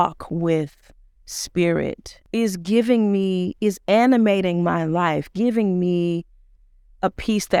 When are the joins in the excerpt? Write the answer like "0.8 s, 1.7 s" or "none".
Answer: 2.1 s